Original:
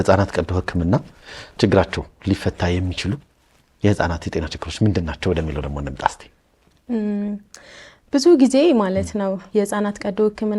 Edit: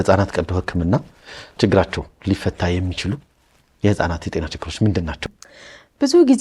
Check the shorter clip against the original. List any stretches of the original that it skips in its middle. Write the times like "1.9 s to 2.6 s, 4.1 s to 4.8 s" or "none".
5.2 s to 7.4 s